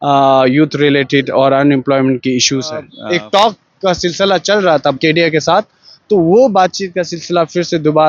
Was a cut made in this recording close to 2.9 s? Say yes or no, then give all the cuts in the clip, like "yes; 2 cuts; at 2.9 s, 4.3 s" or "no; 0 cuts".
yes; 2 cuts; at 2.9 s, 5.0 s